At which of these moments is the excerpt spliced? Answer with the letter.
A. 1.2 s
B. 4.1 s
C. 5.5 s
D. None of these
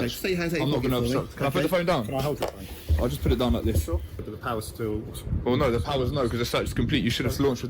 B